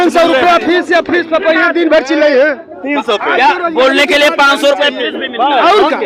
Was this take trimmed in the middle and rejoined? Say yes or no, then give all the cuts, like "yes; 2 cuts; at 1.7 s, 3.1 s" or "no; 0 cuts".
no; 0 cuts